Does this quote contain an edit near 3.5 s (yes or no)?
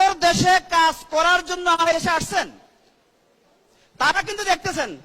no